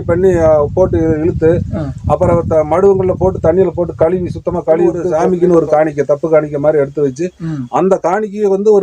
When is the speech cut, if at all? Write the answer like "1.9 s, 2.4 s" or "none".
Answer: 5.0 s